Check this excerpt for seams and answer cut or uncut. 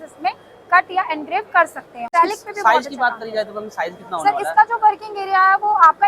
cut